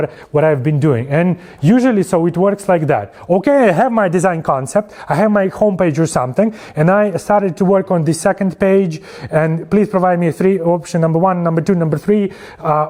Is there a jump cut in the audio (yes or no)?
no